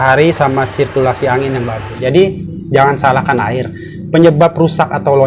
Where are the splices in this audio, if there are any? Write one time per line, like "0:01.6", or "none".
0:01.9

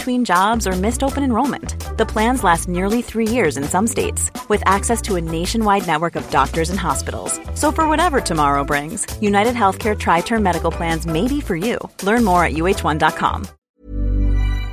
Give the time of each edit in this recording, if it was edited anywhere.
0:13.5

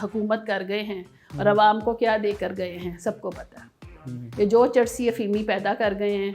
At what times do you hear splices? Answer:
none

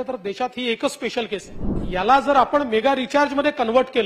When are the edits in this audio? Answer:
0:01.8

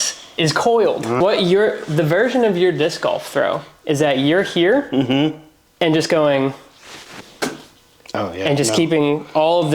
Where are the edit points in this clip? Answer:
0:01.2

